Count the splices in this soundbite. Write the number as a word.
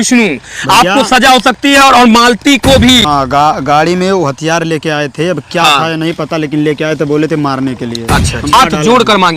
two